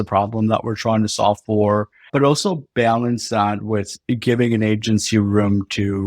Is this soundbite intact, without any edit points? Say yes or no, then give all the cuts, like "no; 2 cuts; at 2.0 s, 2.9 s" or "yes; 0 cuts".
no; 1 cut; at 2.0 s